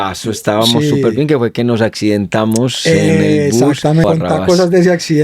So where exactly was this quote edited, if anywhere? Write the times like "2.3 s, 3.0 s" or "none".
4.0 s